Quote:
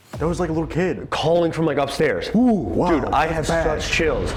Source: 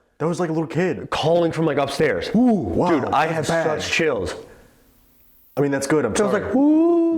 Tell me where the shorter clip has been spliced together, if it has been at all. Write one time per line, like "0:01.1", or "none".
none